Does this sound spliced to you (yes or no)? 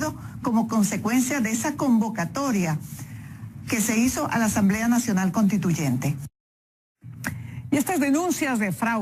no